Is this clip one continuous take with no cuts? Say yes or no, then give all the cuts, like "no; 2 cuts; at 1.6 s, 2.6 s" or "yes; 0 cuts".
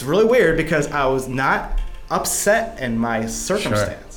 yes; 0 cuts